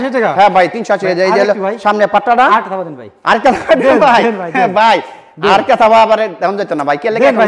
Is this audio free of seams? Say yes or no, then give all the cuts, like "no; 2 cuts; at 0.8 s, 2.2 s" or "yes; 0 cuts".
yes; 0 cuts